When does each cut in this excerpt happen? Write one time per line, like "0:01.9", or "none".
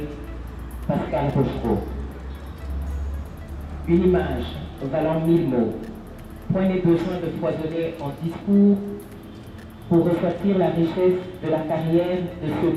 none